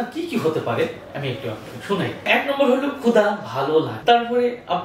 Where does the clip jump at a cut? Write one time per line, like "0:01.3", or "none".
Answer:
0:02.3
0:03.9